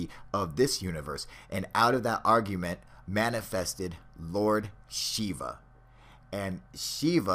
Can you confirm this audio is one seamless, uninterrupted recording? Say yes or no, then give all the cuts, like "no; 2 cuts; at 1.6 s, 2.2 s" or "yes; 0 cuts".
yes; 0 cuts